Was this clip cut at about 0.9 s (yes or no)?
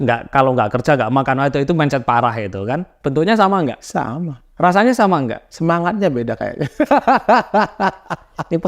no